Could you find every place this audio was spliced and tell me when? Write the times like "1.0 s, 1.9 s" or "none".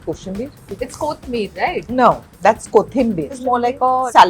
2.3 s, 3.6 s